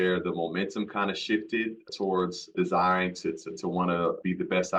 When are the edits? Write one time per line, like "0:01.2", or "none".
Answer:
none